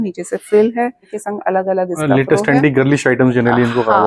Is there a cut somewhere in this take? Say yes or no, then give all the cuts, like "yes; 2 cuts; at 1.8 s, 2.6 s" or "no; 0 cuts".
yes; 1 cut; at 1.1 s